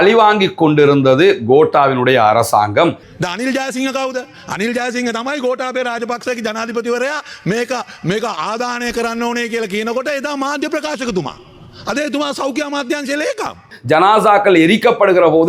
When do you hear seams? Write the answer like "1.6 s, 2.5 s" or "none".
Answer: 3.1 s